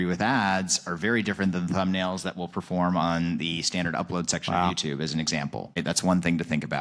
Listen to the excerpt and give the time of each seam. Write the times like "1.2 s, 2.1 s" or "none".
5.8 s